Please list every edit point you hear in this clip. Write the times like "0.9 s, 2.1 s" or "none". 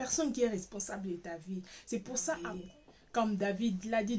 2.5 s